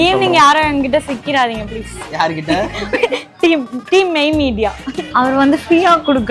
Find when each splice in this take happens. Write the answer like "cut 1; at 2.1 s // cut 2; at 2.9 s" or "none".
cut 1; at 4.8 s